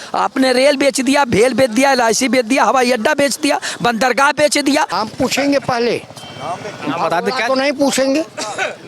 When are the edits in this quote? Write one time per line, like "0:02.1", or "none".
0:04.9